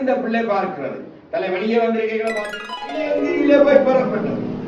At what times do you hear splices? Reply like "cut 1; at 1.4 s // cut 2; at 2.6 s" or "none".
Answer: cut 1; at 2.5 s